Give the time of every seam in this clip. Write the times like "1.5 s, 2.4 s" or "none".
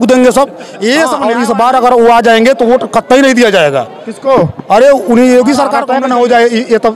1.2 s, 5.8 s